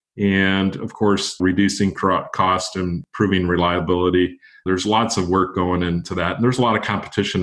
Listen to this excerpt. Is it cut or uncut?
cut